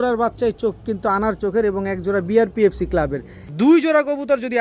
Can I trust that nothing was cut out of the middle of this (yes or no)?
no